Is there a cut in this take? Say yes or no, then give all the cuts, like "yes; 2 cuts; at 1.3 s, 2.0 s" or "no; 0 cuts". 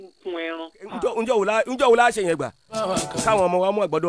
yes; 1 cut; at 0.9 s